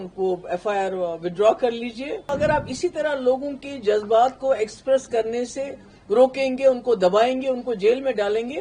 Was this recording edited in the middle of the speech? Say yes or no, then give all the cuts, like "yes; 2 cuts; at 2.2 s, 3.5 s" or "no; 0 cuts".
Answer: yes; 1 cut; at 2.2 s